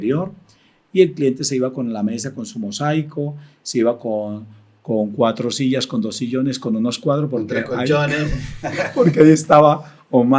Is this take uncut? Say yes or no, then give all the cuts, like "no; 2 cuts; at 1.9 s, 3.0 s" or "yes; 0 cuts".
yes; 0 cuts